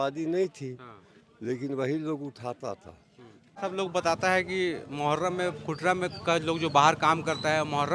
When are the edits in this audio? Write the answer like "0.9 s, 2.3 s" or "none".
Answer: 3.6 s